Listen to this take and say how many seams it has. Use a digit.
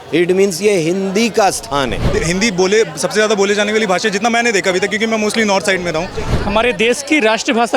2